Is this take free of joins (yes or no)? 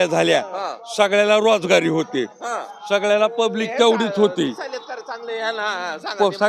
yes